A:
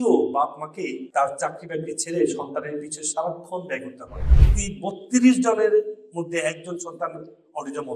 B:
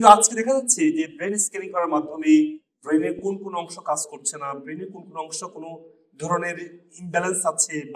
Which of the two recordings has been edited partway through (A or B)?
A